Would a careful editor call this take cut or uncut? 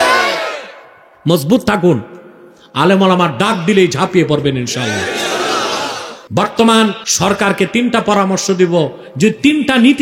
cut